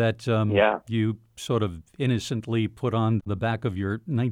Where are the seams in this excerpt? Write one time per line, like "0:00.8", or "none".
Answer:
0:03.2